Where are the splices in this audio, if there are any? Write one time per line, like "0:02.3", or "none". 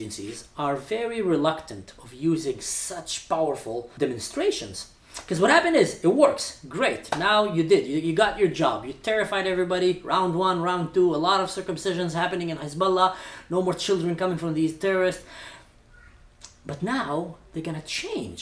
0:03.9